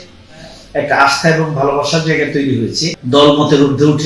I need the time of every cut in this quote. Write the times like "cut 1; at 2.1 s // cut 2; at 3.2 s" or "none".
cut 1; at 2.9 s